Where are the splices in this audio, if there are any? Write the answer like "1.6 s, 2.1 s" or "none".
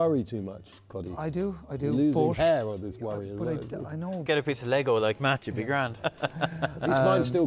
4.2 s, 6.0 s